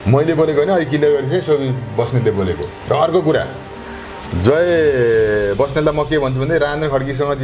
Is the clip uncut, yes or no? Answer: yes